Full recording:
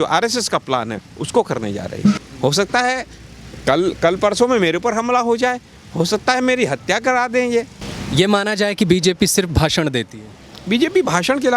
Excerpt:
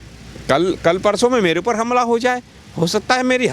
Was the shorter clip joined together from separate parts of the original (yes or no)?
no